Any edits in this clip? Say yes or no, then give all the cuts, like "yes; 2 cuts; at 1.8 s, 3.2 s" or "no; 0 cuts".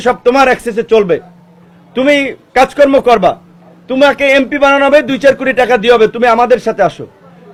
no; 0 cuts